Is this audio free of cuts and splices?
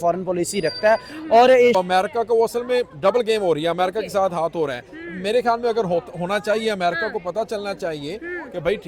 no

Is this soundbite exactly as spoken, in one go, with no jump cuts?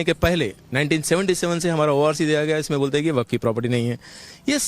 yes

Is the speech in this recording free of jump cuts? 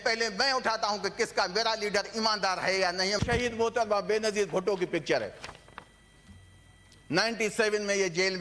no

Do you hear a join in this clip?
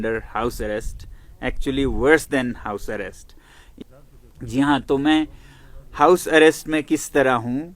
yes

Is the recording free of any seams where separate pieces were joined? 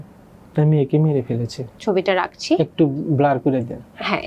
no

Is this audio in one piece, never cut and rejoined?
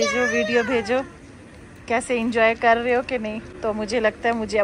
yes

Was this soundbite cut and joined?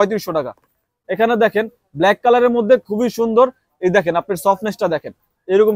yes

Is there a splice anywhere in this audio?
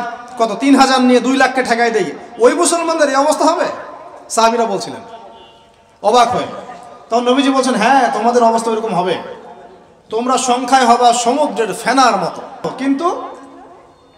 yes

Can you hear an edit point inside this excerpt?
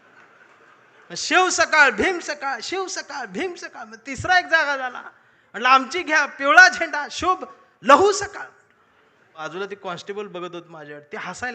yes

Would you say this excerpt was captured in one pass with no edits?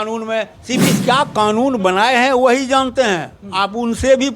no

